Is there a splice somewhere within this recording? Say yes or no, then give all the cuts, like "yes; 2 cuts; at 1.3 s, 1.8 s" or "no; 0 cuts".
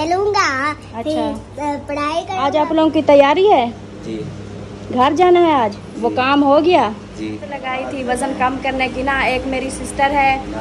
yes; 2 cuts; at 2.3 s, 7.6 s